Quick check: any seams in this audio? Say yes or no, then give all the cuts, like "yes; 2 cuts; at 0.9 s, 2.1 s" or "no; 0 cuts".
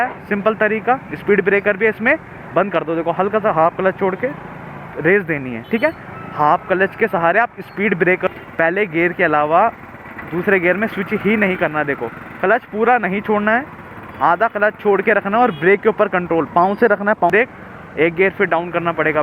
yes; 2 cuts; at 8.3 s, 17.3 s